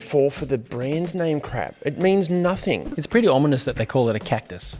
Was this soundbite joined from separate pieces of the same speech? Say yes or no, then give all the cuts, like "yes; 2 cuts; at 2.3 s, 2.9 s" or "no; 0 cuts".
yes; 1 cut; at 2.9 s